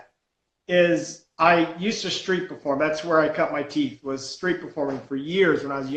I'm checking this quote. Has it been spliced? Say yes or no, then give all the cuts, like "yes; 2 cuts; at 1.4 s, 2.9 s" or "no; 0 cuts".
no; 0 cuts